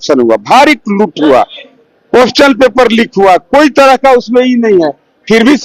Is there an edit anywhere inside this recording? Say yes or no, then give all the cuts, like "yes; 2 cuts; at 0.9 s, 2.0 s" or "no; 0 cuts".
no; 0 cuts